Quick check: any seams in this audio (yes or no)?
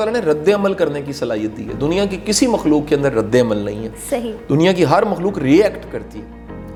no